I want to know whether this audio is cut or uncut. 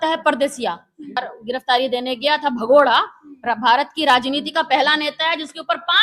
cut